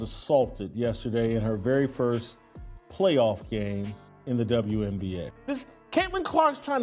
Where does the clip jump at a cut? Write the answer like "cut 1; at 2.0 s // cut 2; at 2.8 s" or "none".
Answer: cut 1; at 5.3 s